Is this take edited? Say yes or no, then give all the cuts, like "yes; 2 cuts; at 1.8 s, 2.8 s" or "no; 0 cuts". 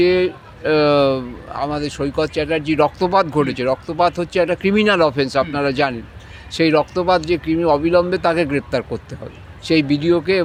no; 0 cuts